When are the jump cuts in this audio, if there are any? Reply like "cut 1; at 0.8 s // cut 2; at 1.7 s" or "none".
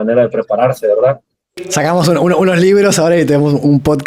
cut 1; at 1.7 s